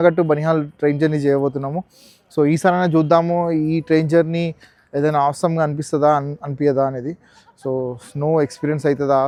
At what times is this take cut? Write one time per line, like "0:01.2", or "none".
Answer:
none